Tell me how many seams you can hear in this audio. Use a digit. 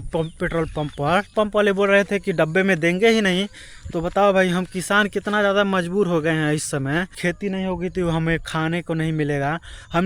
2